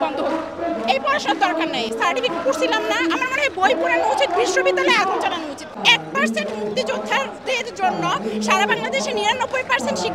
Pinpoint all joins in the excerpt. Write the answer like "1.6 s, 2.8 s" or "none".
none